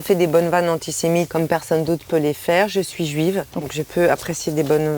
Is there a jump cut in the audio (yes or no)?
yes